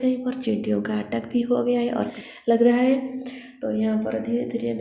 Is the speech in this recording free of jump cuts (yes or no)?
no